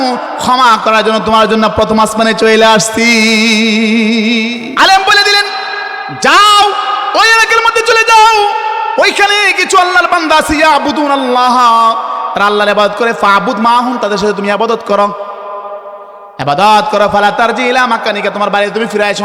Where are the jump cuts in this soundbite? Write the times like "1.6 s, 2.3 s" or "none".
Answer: 4.7 s